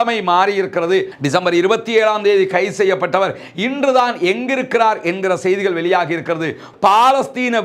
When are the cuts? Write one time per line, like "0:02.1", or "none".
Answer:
0:01.2
0:06.7

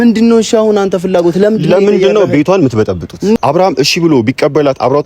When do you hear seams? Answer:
0:03.4

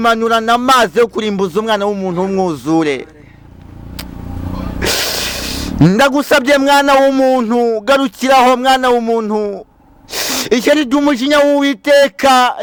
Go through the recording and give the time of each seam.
none

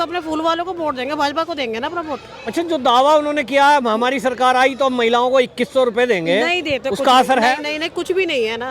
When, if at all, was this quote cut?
none

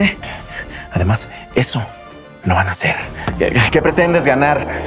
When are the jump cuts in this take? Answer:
0:03.4

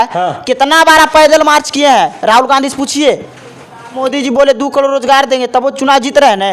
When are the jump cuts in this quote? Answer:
0:04.0

